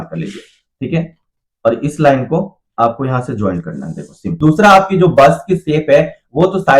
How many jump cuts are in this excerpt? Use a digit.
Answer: 1